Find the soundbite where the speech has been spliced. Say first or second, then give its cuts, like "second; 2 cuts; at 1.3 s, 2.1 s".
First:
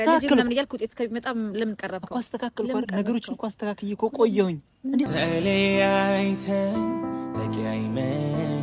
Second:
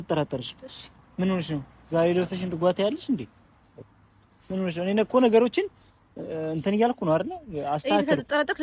first; 1 cut; at 5.1 s